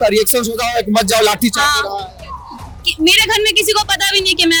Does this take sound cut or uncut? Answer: uncut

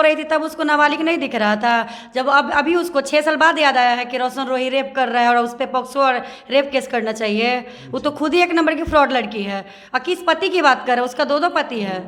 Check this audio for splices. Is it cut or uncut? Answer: uncut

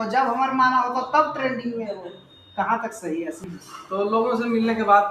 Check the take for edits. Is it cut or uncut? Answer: cut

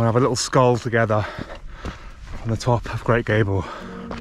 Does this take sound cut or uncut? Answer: uncut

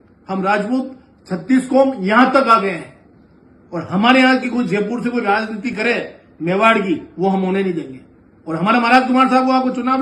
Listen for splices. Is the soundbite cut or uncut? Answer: uncut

